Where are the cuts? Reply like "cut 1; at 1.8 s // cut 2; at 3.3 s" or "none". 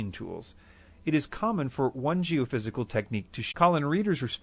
none